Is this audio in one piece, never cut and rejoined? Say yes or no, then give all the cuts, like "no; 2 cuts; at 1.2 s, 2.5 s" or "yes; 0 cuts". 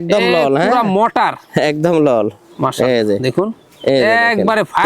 yes; 0 cuts